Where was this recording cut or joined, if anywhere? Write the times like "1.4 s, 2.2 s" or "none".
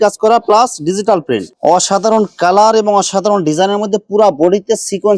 1.5 s